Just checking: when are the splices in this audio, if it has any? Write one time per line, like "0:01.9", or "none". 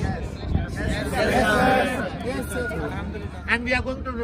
0:03.3